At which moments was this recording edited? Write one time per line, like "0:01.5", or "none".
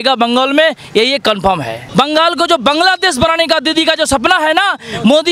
0:01.8